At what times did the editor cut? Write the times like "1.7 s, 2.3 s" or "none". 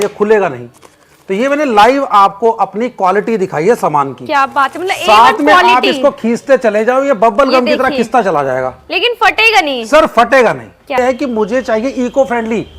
11.0 s

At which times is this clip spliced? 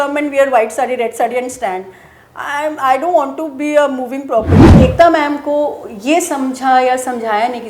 4.6 s

